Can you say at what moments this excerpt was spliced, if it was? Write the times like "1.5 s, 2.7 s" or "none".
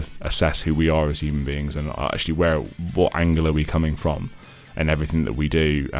2.7 s